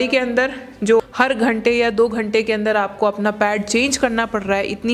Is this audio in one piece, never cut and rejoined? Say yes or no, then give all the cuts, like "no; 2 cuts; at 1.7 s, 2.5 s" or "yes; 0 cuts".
no; 1 cut; at 1.0 s